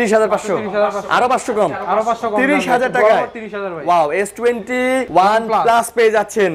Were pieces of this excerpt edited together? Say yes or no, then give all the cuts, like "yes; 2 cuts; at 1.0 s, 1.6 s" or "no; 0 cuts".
yes; 1 cut; at 5.1 s